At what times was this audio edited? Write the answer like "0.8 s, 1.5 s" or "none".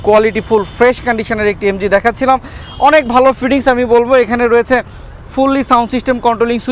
none